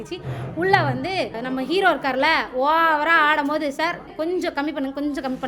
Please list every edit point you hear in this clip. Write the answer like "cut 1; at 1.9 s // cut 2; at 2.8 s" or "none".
cut 1; at 1.4 s // cut 2; at 4.0 s